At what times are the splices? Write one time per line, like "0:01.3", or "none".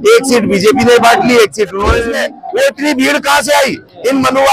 0:02.1